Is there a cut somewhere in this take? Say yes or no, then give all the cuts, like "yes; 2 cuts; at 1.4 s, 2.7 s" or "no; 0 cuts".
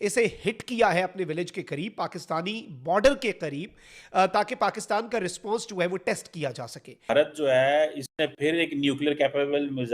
yes; 1 cut; at 6.9 s